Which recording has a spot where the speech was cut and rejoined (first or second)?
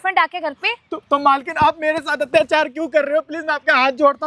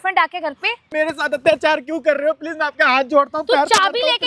second